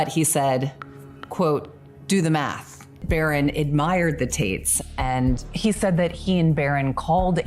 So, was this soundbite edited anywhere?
yes; 1 cut; at 3.0 s

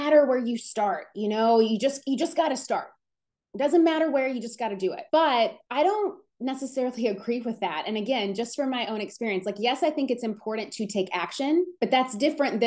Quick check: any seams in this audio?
no; 0 cuts

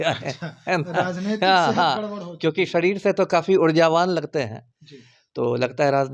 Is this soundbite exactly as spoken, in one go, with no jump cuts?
yes; 0 cuts

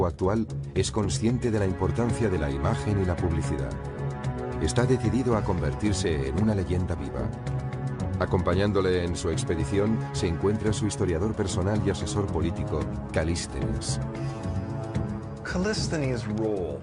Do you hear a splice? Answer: yes; 1 cut; at 12.2 s

